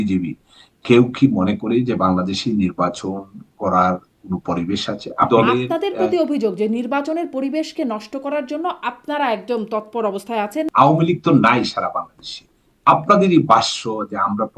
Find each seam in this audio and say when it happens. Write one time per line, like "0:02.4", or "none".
0:05.3
0:10.7